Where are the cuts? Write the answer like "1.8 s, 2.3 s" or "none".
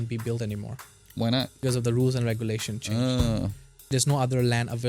1.5 s, 3.8 s